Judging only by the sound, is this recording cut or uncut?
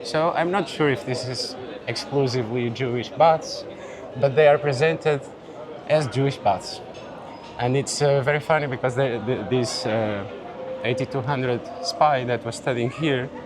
uncut